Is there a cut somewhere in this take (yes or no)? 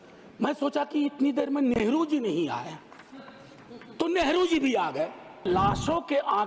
yes